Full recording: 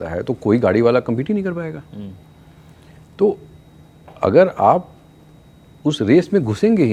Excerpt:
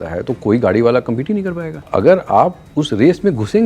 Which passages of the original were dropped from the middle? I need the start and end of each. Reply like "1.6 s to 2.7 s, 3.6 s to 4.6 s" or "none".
1.7 s to 4.0 s, 4.9 s to 5.7 s